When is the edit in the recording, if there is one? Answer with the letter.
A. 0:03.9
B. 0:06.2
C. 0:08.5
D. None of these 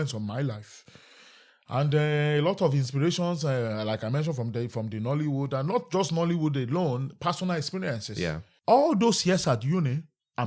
C